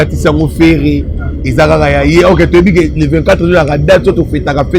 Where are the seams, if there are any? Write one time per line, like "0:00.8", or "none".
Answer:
none